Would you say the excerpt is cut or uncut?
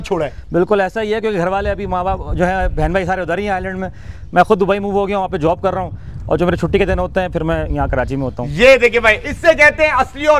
uncut